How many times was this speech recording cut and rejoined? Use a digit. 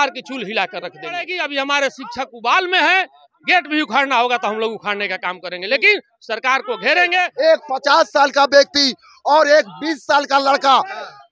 2